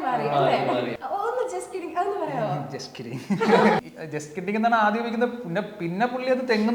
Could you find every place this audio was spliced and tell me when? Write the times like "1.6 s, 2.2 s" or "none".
0.9 s, 3.8 s

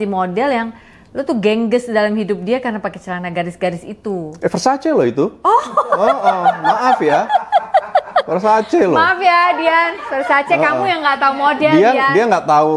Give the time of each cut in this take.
none

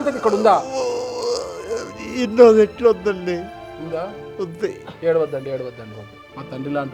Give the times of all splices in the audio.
none

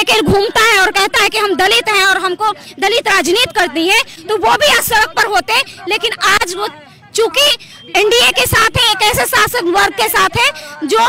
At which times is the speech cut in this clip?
none

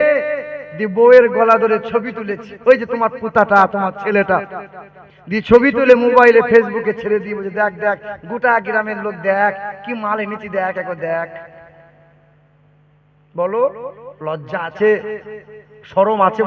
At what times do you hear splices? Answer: none

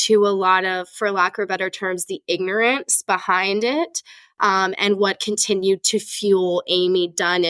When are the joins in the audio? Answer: none

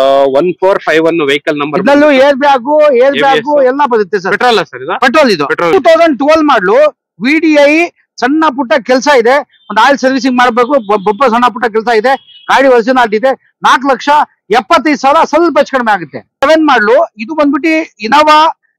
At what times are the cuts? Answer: 5.7 s, 16.4 s

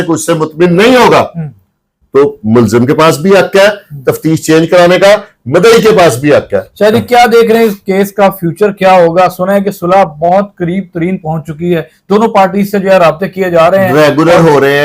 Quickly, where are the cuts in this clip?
none

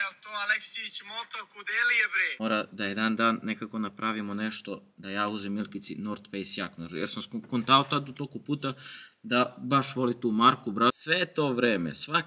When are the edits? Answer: 2.2 s, 11.0 s

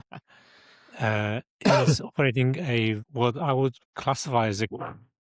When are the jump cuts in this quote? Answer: 3.1 s

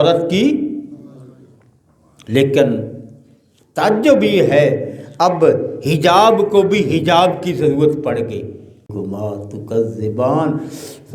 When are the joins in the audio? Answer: 8.7 s

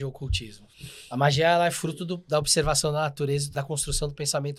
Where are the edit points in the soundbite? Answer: 3.5 s

